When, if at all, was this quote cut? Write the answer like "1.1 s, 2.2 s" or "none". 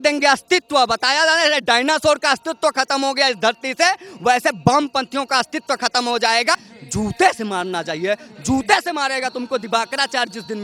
6.7 s